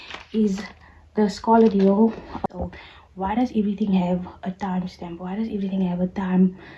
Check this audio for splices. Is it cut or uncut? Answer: cut